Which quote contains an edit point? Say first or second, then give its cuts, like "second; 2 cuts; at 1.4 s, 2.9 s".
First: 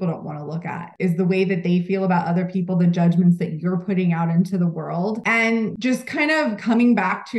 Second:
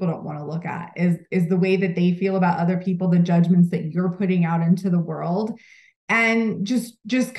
first; 2 cuts; at 0.9 s, 5.7 s